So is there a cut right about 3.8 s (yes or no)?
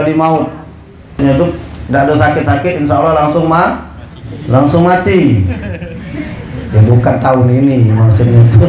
no